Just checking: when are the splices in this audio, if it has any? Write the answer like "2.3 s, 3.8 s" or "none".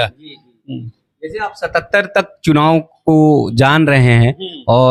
none